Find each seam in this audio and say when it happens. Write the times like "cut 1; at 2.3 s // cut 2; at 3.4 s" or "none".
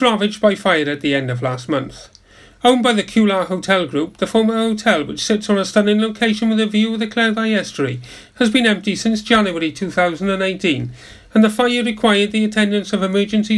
none